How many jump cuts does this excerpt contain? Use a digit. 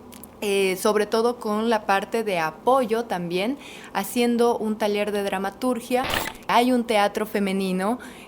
1